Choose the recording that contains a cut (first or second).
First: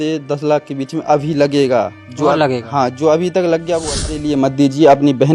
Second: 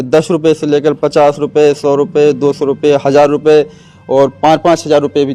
first